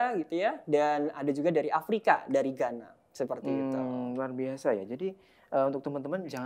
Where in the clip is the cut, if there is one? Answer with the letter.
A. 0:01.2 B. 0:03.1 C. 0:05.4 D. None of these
D